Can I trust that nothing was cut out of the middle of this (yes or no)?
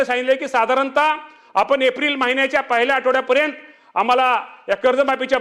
yes